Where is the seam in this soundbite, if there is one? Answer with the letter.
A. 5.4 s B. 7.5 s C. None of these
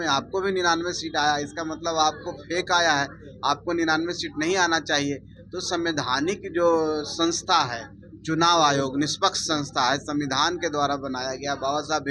C